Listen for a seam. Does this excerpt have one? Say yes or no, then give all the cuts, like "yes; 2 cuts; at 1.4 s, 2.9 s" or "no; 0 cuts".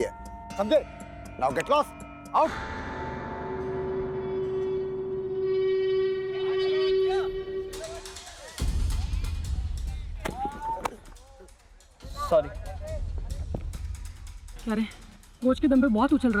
no; 0 cuts